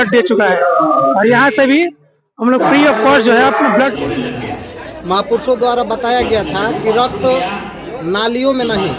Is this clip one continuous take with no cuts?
no; 1 cut; at 3.9 s

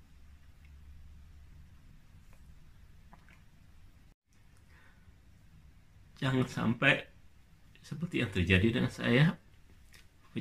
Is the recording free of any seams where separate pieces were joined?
no; 1 cut; at 4.2 s

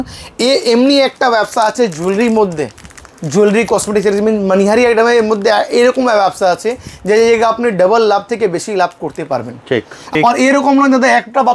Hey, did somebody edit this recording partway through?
yes; 1 cut; at 10.1 s

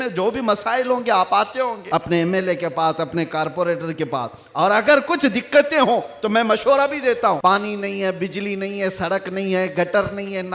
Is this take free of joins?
no; 2 cuts; at 1.8 s, 7.4 s

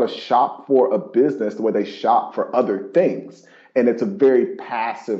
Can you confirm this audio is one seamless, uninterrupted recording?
yes; 0 cuts

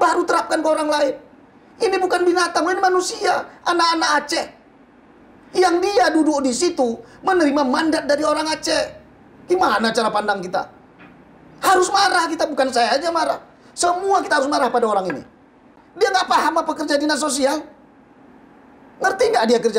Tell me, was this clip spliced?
yes; 1 cut; at 15.8 s

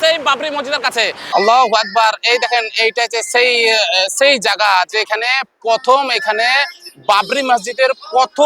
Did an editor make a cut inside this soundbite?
yes; 1 cut; at 1.2 s

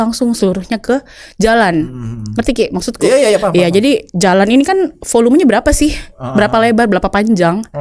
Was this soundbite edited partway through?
no; 0 cuts

